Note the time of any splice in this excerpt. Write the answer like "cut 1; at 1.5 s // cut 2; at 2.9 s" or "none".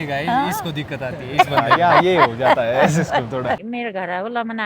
cut 1; at 3.7 s